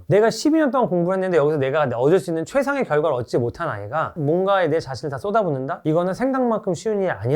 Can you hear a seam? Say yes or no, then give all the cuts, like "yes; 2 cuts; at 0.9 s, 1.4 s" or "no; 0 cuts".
yes; 1 cut; at 4.1 s